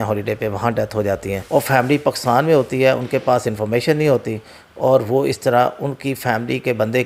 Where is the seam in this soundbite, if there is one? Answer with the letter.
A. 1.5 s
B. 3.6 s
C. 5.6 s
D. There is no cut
D